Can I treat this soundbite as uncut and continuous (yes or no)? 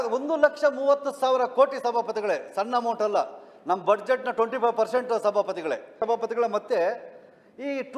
no